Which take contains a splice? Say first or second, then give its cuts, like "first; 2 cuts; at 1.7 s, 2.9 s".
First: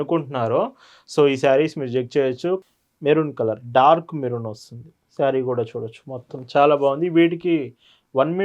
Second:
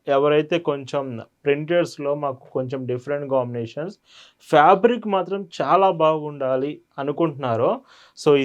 first; 1 cut; at 2.6 s